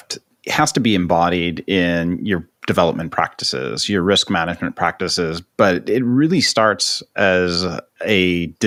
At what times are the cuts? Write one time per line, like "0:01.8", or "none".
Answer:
none